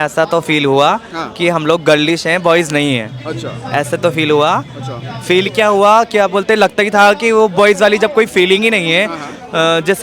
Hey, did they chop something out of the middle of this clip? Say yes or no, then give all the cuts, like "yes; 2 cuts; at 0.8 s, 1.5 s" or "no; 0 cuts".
no; 0 cuts